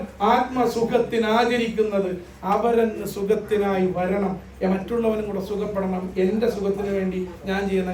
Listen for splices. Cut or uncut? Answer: uncut